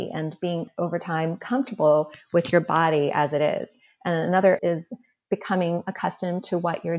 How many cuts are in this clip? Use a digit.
1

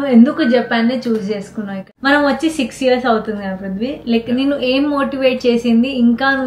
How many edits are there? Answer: 1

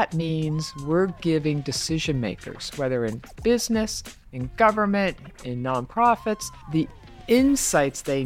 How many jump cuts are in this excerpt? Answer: 0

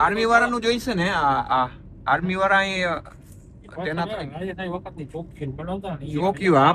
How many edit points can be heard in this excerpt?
0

